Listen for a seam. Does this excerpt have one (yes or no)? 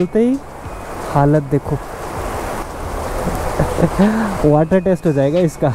yes